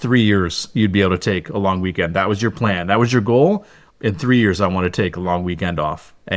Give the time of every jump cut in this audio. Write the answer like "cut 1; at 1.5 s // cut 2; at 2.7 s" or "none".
cut 1; at 3.8 s